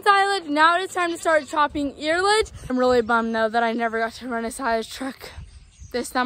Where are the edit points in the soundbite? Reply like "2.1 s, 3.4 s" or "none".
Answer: 2.7 s